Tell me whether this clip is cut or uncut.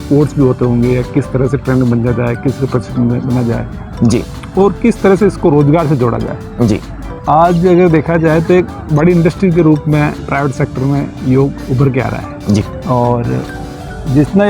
cut